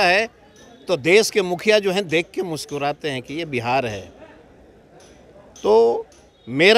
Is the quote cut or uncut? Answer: uncut